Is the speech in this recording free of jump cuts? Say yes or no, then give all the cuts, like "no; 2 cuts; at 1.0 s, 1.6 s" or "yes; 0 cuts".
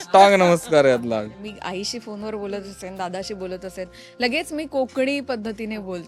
no; 1 cut; at 1.5 s